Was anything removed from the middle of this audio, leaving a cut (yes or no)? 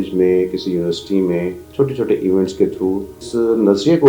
yes